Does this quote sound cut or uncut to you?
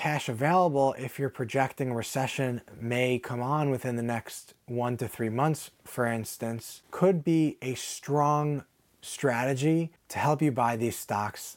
uncut